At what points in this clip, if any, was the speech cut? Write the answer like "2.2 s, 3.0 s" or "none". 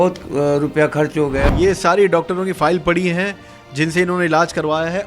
1.4 s